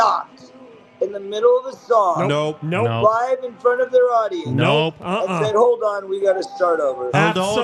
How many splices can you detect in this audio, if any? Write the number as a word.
zero